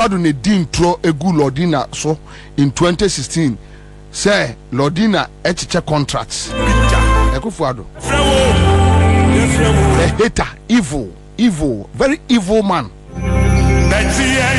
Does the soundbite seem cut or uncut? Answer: uncut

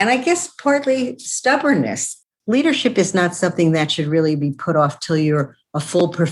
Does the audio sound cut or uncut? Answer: cut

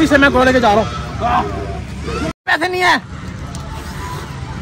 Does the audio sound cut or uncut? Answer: cut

